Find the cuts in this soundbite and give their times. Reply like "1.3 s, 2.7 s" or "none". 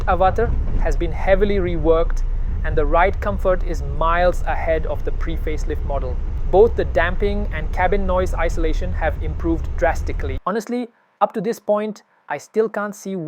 6.3 s, 10.3 s